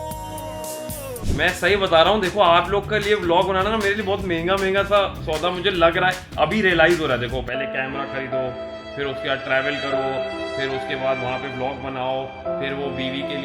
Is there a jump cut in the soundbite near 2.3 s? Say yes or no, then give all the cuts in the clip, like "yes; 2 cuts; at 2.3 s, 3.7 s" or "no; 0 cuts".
no; 1 cut; at 1.1 s